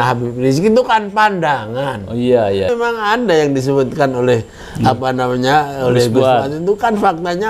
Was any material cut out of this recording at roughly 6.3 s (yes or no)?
no